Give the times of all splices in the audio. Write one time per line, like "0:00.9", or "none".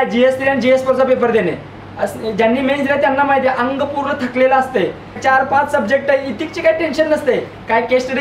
none